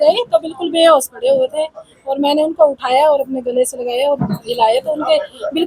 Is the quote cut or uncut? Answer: uncut